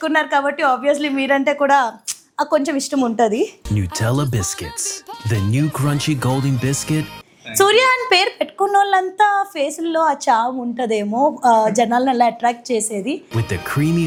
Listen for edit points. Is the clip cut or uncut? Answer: uncut